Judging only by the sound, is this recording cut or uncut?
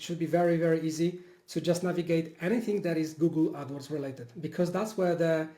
uncut